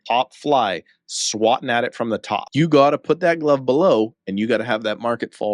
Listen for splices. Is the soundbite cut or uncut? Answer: cut